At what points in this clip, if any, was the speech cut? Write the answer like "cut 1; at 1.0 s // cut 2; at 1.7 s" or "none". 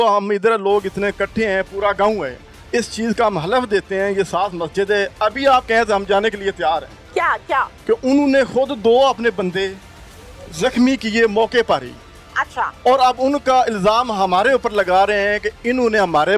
none